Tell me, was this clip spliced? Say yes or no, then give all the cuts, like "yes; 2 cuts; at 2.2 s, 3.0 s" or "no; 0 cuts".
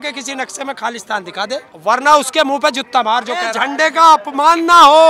yes; 2 cuts; at 1.7 s, 3.5 s